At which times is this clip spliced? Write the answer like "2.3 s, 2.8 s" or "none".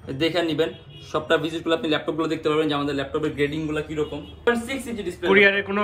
4.5 s